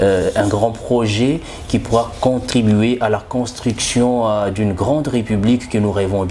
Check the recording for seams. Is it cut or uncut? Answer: uncut